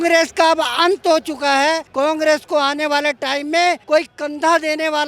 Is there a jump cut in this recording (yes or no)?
yes